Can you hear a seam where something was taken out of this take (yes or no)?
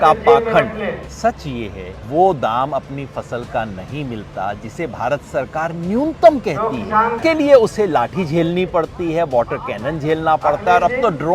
yes